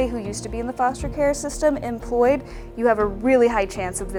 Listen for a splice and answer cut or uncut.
uncut